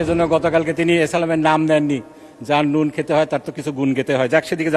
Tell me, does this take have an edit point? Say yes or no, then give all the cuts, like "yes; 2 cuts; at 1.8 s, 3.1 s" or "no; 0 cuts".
no; 0 cuts